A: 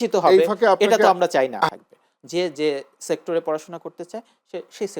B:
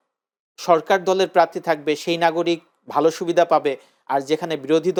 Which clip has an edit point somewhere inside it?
A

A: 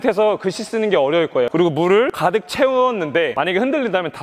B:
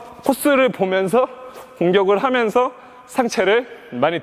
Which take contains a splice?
A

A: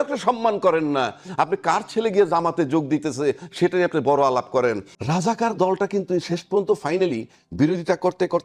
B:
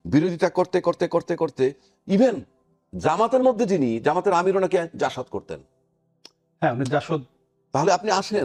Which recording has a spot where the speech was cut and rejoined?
A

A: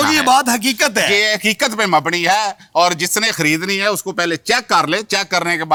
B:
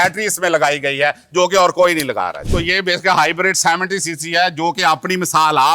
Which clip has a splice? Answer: B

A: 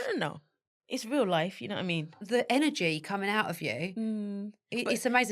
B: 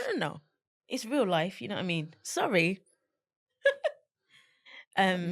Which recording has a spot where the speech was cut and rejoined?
A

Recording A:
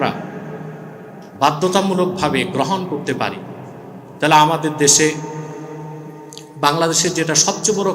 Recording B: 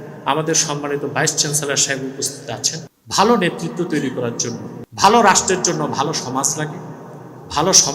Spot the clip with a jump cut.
B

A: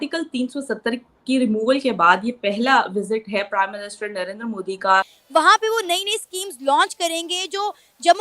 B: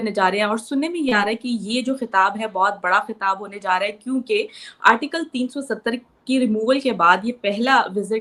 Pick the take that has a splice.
A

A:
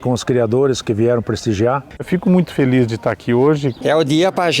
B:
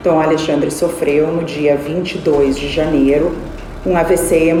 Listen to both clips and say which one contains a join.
A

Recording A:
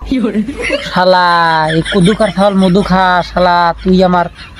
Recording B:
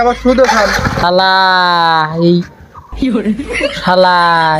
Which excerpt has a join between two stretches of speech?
B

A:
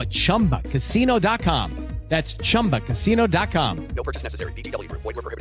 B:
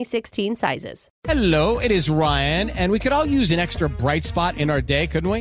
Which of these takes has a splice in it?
B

